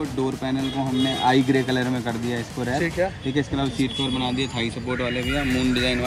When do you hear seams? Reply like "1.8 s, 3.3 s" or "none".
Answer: none